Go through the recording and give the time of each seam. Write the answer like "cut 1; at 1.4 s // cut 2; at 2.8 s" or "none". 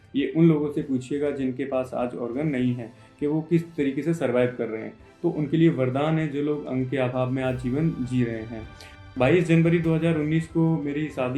cut 1; at 9.1 s